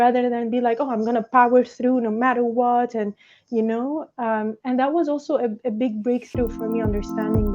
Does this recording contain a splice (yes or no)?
no